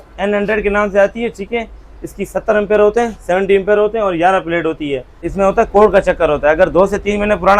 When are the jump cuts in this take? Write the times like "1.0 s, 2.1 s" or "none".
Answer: 5.3 s